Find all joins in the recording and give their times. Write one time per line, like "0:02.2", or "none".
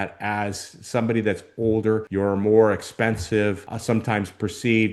0:02.1
0:03.7